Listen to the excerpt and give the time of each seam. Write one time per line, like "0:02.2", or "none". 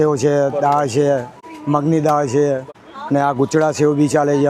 none

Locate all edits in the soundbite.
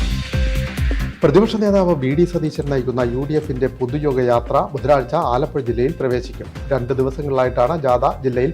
0:01.1

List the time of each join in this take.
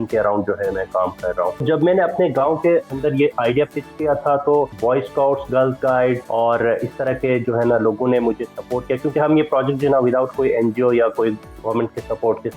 0:01.6
0:04.7
0:06.2

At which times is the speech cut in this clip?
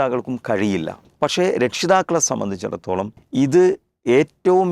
0:01.0
0:03.2

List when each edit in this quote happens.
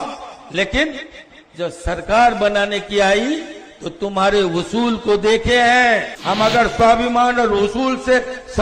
0:06.1

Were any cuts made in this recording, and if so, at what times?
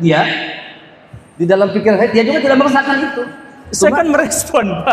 none

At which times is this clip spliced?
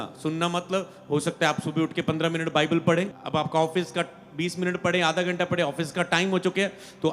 0:03.2

